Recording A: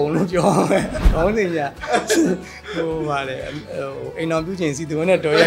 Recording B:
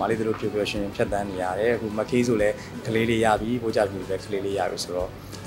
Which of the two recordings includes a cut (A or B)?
A